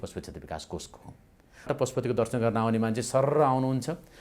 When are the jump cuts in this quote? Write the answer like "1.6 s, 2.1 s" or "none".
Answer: 1.7 s